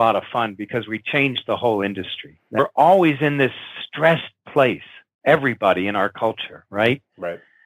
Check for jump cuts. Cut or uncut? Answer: cut